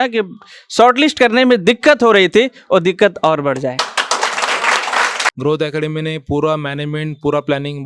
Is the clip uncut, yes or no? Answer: no